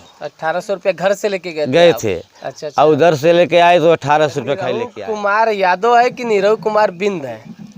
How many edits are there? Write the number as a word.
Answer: one